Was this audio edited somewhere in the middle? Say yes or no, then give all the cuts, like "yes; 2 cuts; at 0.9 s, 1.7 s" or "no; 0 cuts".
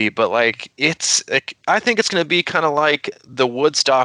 no; 0 cuts